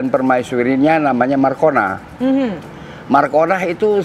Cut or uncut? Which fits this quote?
uncut